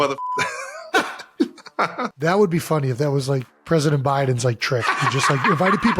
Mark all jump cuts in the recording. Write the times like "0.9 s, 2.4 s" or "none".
0.9 s, 2.2 s, 3.5 s